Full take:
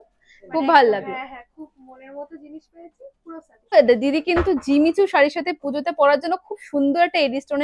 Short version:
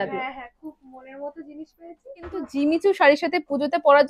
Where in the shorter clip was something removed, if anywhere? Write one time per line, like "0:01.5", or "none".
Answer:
0:02.4